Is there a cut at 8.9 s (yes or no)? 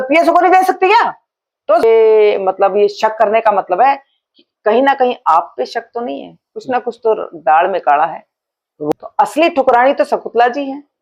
yes